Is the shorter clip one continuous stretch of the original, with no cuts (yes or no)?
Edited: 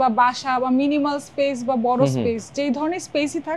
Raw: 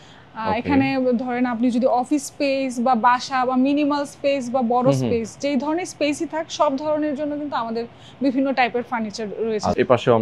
yes